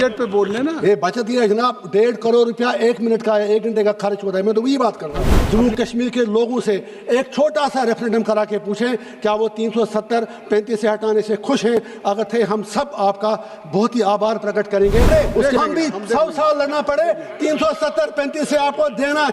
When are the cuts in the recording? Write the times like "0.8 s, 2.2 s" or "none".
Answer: 5.4 s, 15.1 s